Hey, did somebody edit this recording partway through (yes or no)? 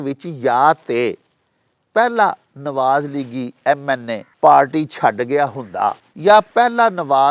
yes